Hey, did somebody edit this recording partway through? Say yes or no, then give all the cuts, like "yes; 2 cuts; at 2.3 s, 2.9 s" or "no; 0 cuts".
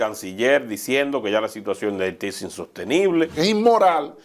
yes; 1 cut; at 3.3 s